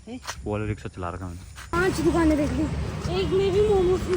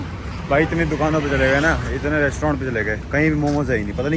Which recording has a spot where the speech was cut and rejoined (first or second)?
first